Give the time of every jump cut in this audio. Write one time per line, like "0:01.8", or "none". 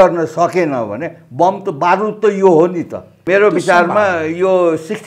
0:03.2